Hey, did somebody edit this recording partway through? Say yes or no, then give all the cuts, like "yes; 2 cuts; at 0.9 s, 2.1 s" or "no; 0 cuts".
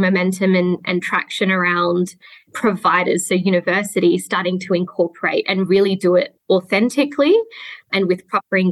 no; 0 cuts